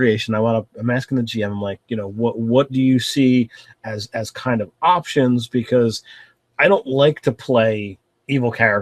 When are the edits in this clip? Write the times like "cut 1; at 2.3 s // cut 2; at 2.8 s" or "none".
none